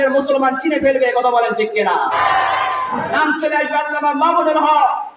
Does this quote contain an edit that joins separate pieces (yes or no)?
yes